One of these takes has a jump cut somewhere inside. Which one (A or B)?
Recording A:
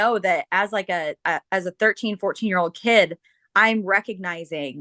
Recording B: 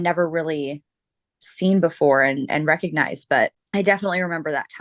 B